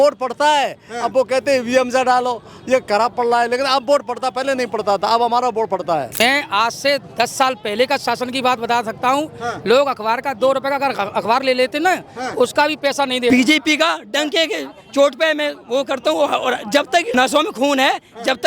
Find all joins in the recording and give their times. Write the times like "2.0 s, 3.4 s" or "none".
6.1 s, 13.3 s, 17.1 s